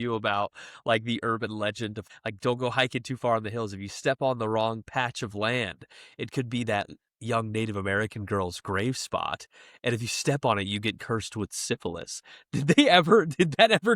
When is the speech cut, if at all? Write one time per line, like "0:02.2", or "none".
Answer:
0:02.1